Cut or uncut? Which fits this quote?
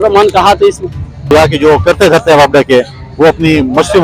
cut